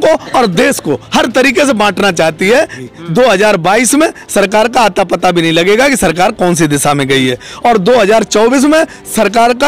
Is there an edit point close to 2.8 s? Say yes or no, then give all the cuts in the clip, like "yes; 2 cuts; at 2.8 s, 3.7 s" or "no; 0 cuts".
yes; 1 cut; at 2.8 s